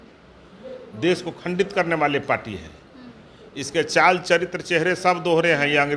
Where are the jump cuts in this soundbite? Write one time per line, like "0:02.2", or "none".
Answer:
none